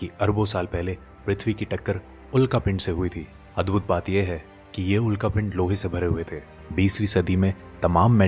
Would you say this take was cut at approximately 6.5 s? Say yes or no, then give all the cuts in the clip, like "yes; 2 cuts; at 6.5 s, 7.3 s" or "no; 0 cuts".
yes; 1 cut; at 6.5 s